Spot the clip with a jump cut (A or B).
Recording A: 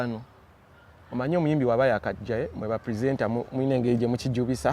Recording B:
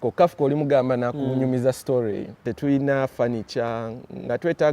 B